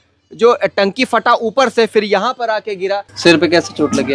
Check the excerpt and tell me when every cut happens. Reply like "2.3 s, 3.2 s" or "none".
3.1 s